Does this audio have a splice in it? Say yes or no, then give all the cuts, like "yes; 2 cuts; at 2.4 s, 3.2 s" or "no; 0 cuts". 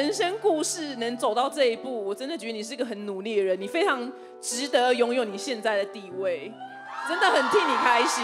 no; 0 cuts